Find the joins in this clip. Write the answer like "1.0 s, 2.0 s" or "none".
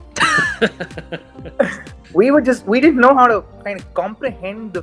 none

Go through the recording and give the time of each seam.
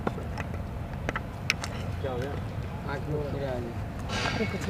none

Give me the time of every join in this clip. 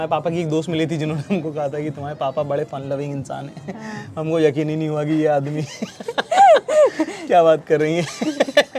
none

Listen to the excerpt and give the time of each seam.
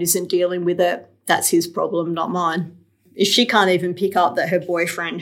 3.0 s

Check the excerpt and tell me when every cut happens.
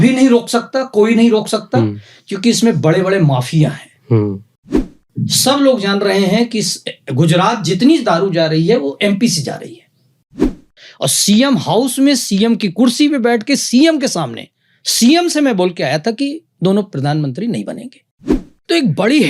4.9 s, 10.4 s, 18.3 s

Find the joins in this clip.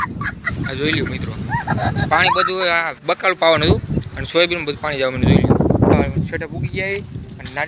5.9 s

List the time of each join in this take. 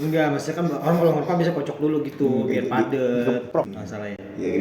3.5 s

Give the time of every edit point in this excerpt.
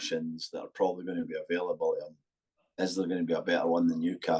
none

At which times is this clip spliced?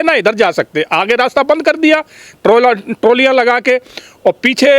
none

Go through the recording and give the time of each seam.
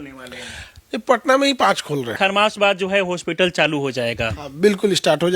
2.1 s

